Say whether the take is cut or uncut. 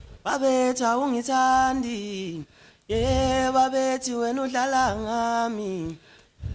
uncut